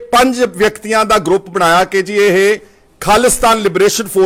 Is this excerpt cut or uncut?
uncut